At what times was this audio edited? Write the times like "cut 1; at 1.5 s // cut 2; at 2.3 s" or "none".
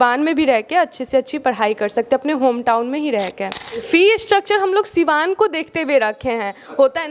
cut 1; at 3.8 s